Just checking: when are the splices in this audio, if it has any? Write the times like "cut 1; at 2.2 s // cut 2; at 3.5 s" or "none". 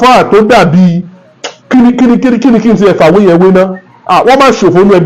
none